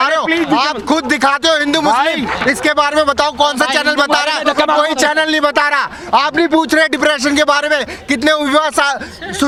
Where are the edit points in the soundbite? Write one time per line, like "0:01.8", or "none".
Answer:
none